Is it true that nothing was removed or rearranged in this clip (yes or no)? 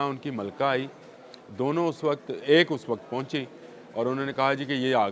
yes